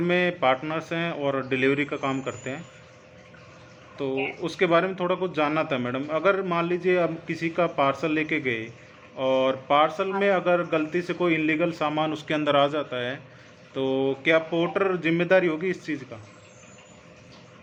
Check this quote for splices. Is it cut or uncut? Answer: uncut